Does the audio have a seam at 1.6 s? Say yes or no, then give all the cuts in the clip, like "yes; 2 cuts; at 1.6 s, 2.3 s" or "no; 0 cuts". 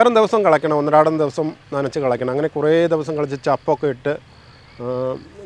no; 0 cuts